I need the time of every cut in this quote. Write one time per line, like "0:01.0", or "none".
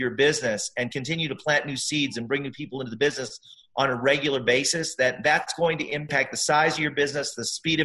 0:01.0
0:06.1